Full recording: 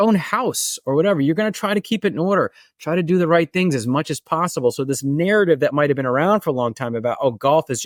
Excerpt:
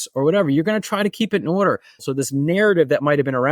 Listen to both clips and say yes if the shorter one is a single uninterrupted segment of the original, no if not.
no